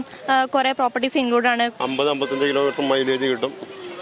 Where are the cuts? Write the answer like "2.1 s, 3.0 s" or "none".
1.7 s